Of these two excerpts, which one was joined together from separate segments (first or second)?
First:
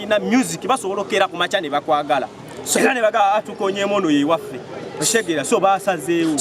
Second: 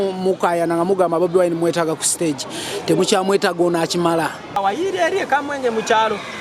second